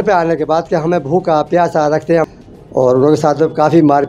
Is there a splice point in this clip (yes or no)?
yes